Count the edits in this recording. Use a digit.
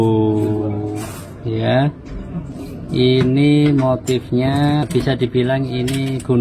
2